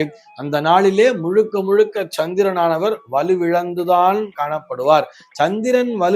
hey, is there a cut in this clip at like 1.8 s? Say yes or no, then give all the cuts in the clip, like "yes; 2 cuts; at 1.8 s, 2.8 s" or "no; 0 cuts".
no; 0 cuts